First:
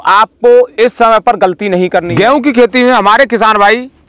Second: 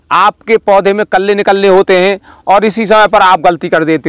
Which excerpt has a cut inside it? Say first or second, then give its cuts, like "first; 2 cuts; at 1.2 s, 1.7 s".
first; 1 cut; at 2.1 s